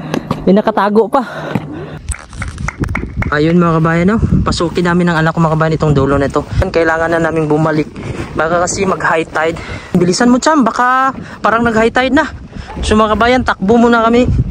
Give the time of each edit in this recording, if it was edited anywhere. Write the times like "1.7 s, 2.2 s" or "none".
2.1 s, 6.6 s, 9.9 s